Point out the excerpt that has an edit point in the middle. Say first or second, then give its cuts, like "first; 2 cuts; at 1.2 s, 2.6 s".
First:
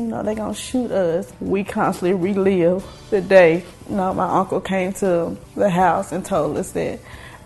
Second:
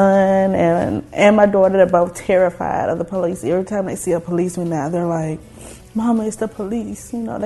first; 4 cuts; at 1.3 s, 2.9 s, 3.8 s, 5.4 s